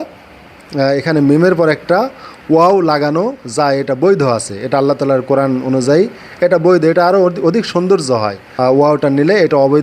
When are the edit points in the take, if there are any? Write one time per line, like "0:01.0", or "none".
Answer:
0:08.4